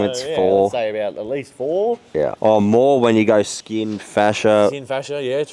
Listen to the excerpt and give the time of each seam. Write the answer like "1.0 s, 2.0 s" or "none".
2.3 s

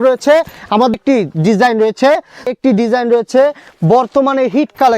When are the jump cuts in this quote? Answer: 0.9 s, 2.5 s

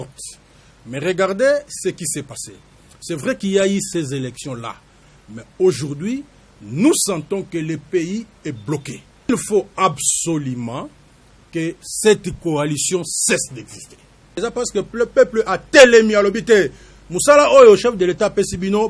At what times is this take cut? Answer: 9.3 s, 14.2 s

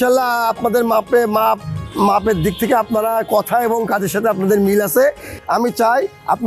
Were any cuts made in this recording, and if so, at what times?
5.3 s

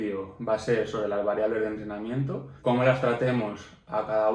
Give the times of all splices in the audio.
2.5 s

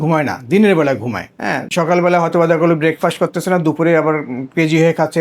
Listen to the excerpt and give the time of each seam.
1.6 s

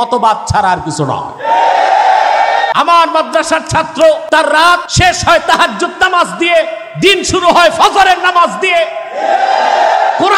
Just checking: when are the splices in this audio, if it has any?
2.7 s, 4.6 s

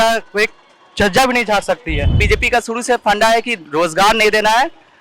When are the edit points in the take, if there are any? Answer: 2.2 s

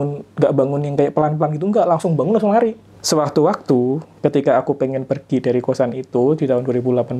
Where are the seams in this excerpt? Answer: 2.9 s

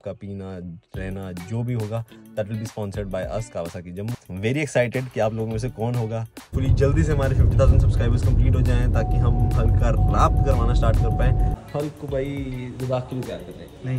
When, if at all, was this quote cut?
4.2 s, 6.5 s, 11.6 s

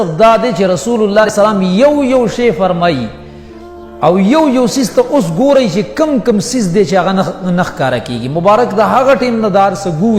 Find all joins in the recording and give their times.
1.3 s

